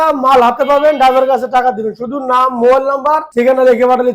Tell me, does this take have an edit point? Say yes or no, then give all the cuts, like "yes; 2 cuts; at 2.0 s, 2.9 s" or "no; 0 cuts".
yes; 1 cut; at 3.2 s